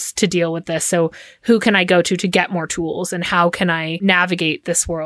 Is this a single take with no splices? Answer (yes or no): no